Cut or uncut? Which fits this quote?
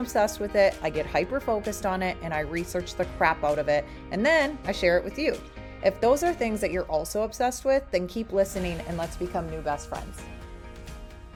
uncut